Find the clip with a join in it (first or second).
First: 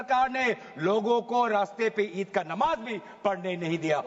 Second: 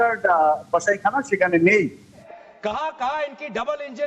second